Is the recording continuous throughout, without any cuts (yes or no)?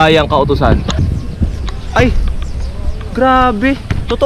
no